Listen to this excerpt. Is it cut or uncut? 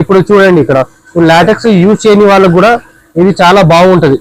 uncut